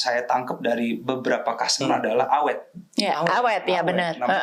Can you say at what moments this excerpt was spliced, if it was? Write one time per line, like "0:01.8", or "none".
none